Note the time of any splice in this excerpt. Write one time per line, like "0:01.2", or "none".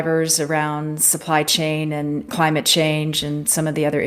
0:02.2